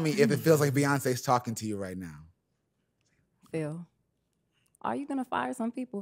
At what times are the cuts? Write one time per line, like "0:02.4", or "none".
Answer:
none